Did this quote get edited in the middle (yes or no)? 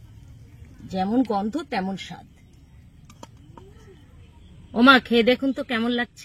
yes